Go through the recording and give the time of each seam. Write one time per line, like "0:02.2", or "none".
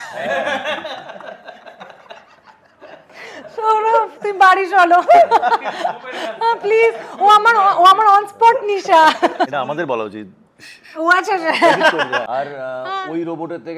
0:09.5
0:12.2

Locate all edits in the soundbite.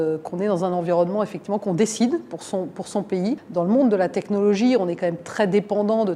0:03.4

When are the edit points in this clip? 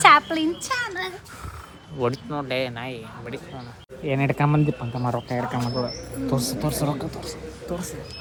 none

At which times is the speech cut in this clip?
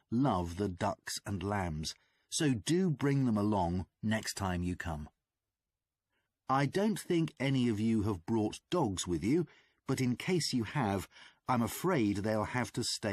0:07.5

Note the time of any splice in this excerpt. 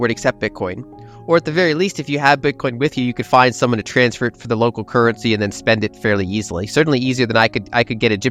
none

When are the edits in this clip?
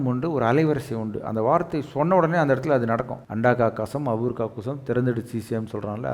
0:03.2

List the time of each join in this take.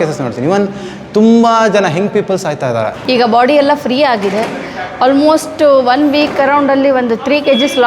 0:03.0

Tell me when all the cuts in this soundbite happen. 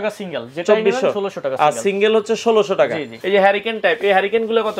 0:03.1

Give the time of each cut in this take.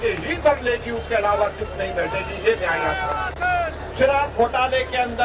0:03.8

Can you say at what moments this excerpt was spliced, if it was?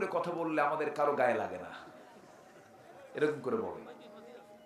none

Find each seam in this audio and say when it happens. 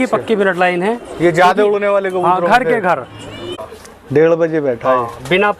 0:03.5

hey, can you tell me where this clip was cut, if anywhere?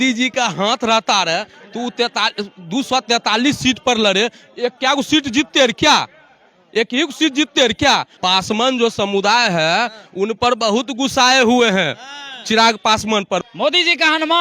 0:08.1
0:13.4

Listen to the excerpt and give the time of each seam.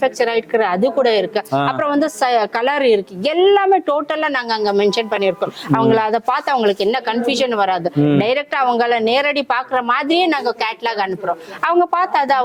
none

